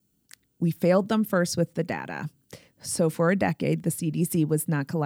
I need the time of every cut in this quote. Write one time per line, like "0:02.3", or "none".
none